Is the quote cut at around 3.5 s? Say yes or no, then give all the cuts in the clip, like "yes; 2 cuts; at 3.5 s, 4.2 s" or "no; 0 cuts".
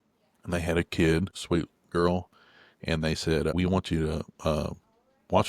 yes; 2 cuts; at 1.4 s, 3.5 s